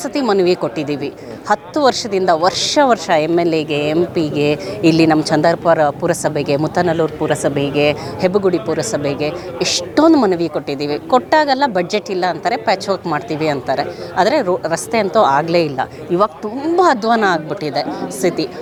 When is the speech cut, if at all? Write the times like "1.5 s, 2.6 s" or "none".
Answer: none